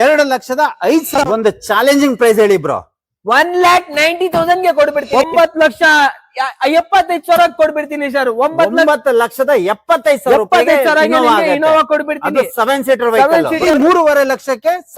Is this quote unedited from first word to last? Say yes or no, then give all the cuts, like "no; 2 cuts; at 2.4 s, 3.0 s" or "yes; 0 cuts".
no; 3 cuts; at 1.1 s, 5.1 s, 13.6 s